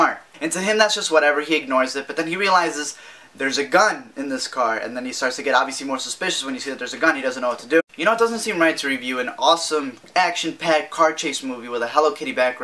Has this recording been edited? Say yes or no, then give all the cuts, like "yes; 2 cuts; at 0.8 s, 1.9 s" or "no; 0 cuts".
no; 0 cuts